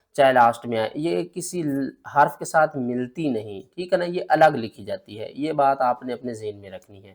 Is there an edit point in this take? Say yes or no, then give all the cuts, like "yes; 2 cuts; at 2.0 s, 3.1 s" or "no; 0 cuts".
no; 0 cuts